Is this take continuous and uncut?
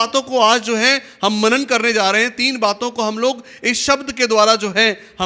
yes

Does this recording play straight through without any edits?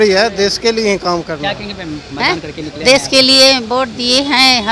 yes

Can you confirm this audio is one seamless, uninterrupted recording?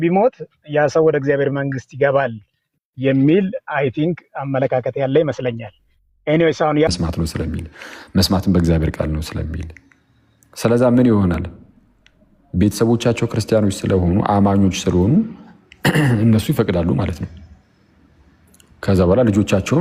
no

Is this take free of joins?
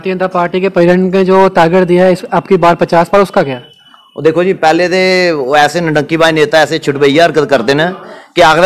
yes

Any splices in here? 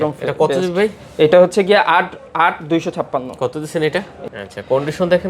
yes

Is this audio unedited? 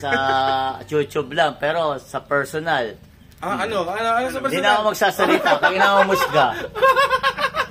no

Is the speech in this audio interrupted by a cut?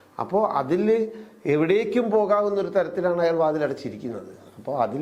no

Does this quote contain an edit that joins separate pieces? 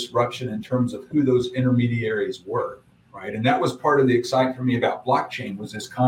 no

